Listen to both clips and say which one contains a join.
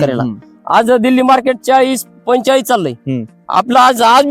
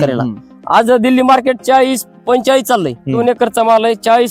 second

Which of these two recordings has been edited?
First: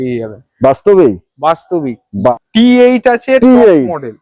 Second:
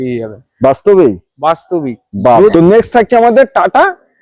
first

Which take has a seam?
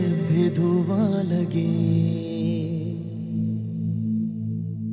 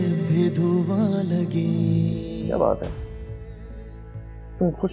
second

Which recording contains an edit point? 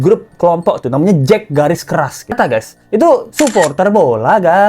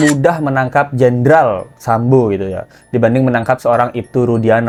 first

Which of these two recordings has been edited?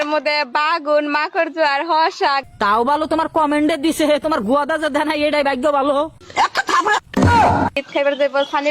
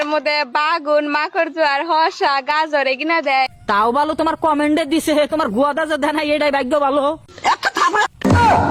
first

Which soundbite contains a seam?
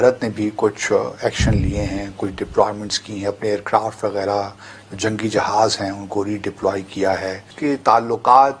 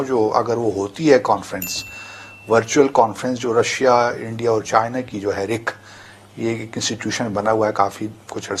first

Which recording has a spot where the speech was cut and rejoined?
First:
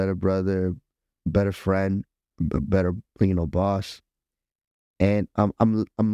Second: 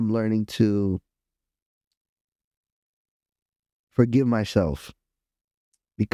first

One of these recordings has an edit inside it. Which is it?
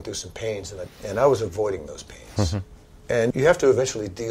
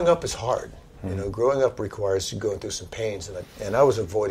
first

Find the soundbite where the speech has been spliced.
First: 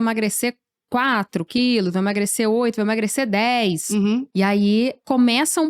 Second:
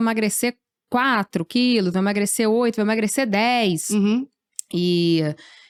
first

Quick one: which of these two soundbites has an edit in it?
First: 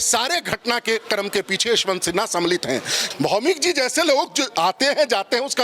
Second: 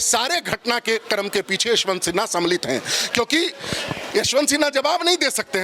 first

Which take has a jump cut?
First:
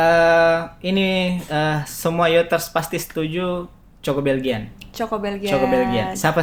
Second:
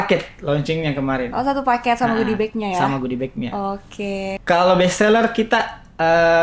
second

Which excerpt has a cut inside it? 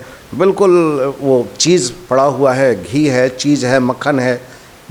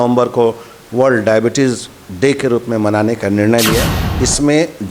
second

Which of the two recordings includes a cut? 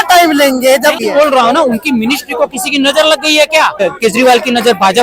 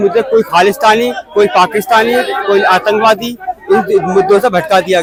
first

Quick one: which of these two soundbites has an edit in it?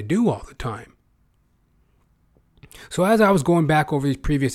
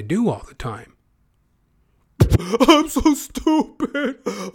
second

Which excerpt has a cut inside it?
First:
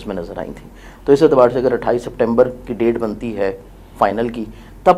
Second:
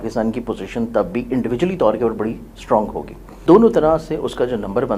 second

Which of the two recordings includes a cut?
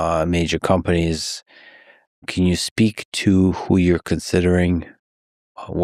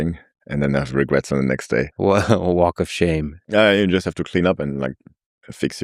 second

